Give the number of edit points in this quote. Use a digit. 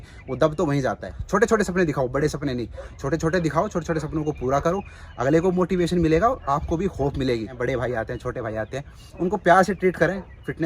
2